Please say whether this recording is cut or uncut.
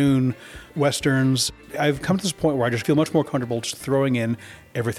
cut